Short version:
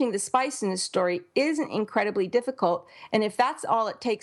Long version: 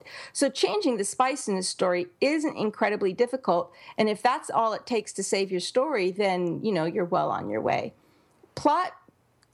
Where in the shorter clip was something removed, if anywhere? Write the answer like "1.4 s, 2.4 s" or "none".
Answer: none